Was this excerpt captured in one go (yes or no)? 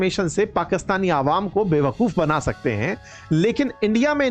yes